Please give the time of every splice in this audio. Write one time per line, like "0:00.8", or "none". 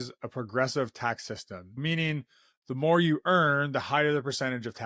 0:01.8